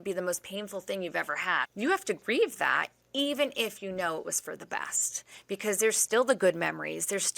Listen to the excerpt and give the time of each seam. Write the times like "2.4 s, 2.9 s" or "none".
1.6 s